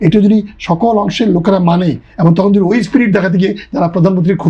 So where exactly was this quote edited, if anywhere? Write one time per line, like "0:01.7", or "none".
none